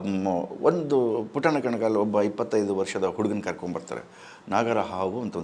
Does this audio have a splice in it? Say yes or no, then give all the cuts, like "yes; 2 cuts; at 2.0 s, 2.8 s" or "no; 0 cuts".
no; 0 cuts